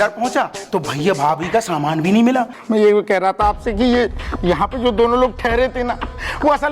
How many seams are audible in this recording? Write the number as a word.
one